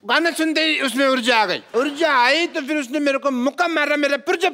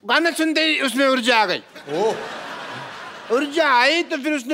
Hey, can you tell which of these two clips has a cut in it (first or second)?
first